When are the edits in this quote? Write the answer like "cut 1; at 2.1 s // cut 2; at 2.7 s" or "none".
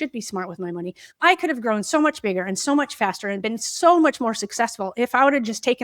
cut 1; at 1.0 s